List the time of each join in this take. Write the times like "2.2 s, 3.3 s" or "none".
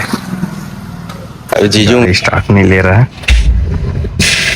2.1 s